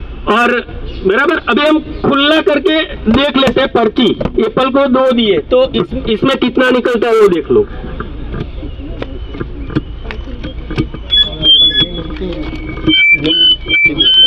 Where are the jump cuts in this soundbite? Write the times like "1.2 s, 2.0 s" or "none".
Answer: none